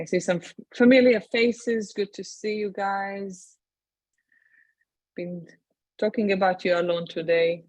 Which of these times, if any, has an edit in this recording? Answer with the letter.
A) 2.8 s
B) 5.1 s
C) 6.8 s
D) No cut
C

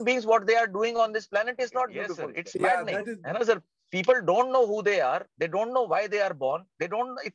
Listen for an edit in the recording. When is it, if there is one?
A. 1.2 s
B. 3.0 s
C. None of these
B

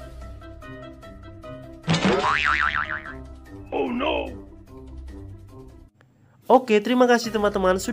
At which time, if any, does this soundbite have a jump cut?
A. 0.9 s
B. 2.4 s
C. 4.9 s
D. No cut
A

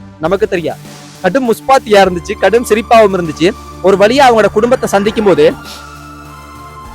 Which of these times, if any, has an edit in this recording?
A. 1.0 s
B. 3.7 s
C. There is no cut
A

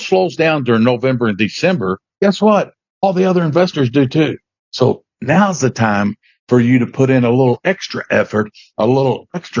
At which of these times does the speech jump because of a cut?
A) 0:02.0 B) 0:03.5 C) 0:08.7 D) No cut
A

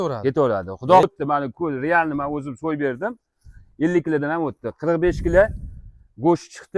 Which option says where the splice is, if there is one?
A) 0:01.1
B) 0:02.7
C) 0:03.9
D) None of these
A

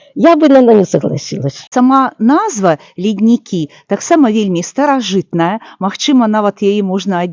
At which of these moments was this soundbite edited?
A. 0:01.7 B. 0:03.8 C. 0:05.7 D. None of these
A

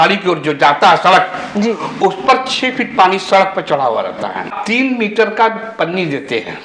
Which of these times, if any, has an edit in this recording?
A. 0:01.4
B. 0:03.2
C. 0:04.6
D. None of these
C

